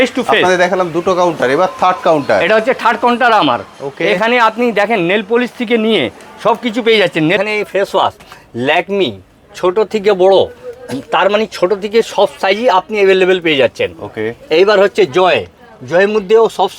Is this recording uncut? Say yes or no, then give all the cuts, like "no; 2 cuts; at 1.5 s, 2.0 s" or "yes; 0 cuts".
no; 1 cut; at 7.4 s